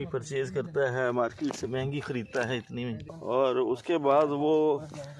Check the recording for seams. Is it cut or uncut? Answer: cut